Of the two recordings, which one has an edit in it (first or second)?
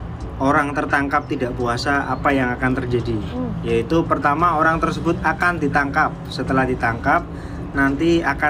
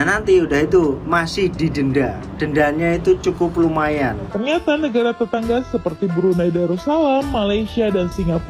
second